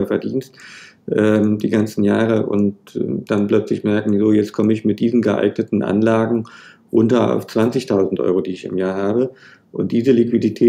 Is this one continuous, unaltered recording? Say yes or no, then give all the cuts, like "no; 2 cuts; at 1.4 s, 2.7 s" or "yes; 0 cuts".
yes; 0 cuts